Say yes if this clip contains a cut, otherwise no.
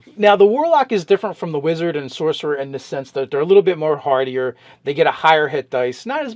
yes